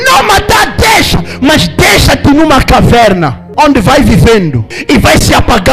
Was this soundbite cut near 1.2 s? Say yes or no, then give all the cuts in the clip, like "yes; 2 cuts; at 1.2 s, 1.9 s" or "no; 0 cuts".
no; 2 cuts; at 3.4 s, 4.7 s